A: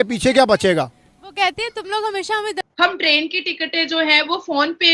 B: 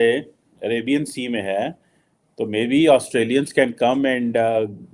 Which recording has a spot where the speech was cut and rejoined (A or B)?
A